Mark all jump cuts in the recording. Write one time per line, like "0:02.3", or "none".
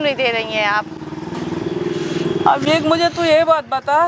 none